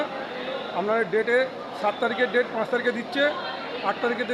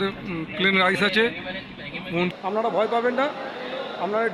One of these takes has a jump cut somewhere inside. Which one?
second; 1 cut; at 2.3 s

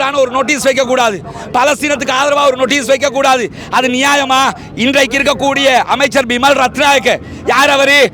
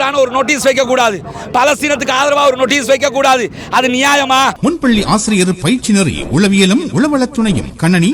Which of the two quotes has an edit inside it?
second; 1 cut; at 4.6 s

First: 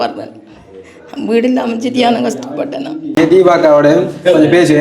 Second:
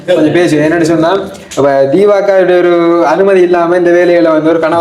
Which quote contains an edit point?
first; 1 cut; at 3.2 s

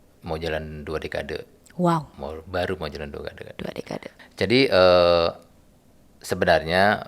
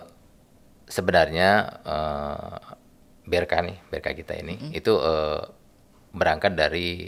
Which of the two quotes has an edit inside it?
first; 1 cut; at 4.2 s

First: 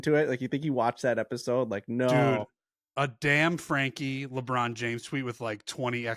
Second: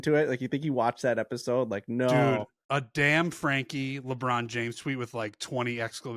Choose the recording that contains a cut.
second; 1 cut; at 2.6 s

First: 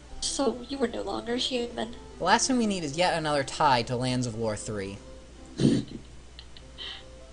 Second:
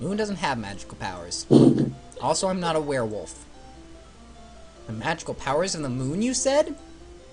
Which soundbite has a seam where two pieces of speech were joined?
second; 1 cut; at 1.6 s

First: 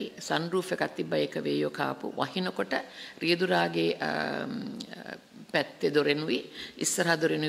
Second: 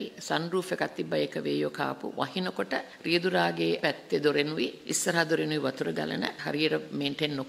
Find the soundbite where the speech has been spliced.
second; 4 cuts; at 2.9 s, 3.8 s, 4.8 s, 6.4 s

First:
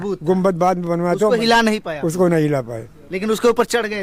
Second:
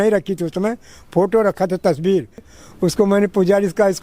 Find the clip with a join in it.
second; 1 cut; at 2.5 s

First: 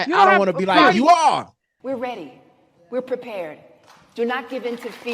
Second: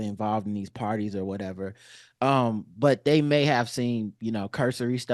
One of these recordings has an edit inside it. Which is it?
first; 1 cut; at 1.8 s

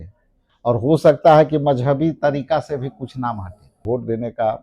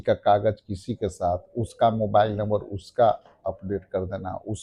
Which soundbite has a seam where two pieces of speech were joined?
first; 1 cut; at 3.7 s

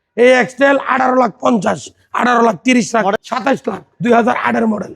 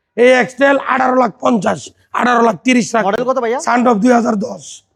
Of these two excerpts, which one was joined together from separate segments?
first; 1 cut; at 3.2 s

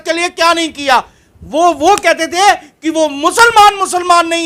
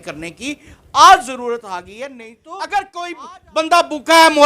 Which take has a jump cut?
second; 1 cut; at 2.3 s

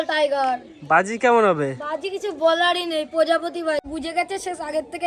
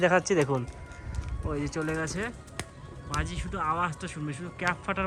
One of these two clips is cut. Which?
first; 1 cut; at 3.9 s

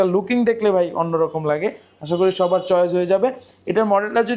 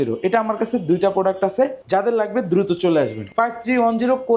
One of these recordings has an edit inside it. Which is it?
second; 2 cuts; at 1.8 s, 3.3 s

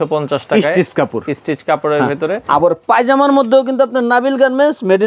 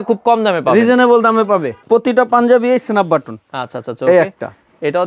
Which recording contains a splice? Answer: second; 1 cut; at 1.8 s

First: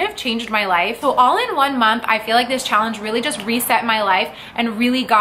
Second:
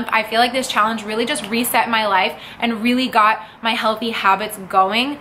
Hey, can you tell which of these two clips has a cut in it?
first; 1 cut; at 1.0 s

